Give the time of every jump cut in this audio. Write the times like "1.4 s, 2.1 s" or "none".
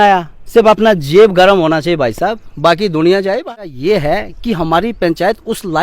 3.5 s

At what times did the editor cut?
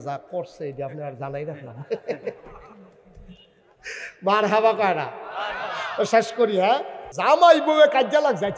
7.0 s

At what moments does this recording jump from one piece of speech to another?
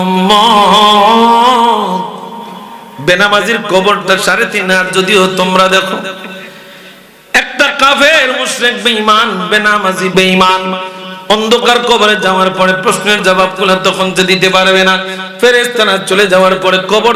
10.1 s

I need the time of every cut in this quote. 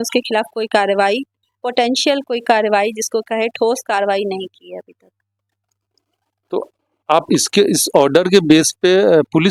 none

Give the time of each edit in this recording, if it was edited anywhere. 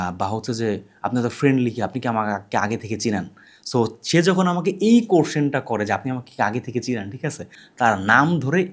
7.5 s

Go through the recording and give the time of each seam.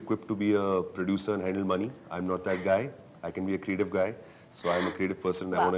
none

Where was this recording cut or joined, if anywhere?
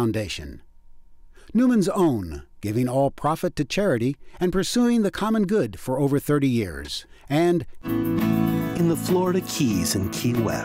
8.5 s

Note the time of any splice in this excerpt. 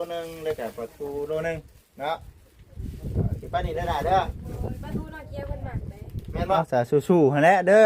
6.6 s

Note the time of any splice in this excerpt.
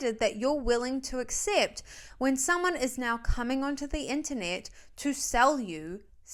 none

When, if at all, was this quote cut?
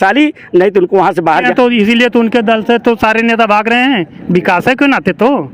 1.5 s

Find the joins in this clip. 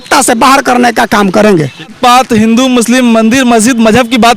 2.0 s

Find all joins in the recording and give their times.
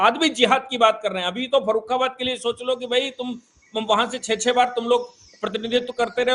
none

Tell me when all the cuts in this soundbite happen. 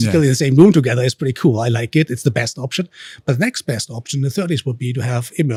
none

